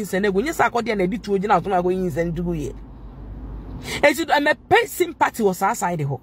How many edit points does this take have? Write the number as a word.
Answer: zero